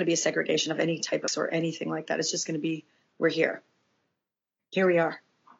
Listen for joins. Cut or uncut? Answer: cut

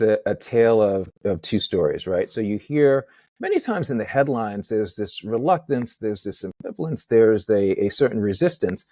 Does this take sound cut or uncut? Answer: cut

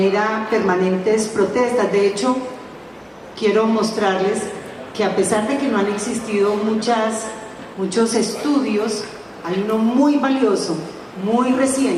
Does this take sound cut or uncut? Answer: uncut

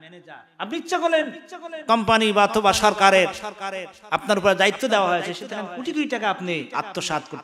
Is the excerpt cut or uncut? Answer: uncut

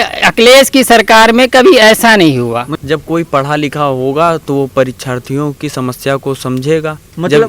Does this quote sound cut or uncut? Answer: cut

